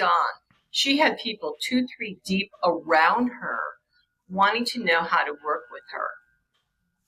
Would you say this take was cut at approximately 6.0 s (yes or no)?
no